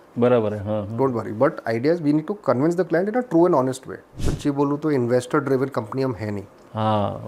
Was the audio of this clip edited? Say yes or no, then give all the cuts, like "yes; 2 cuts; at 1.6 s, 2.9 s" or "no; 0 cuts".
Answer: yes; 1 cut; at 4.1 s